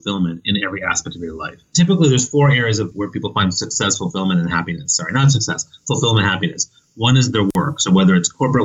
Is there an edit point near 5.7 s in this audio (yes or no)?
no